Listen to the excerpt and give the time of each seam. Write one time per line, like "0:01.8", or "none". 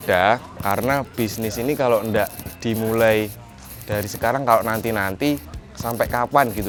none